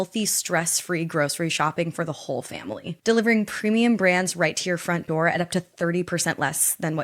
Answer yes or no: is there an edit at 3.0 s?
yes